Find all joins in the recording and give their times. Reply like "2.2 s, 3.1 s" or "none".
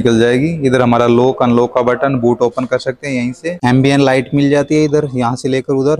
3.6 s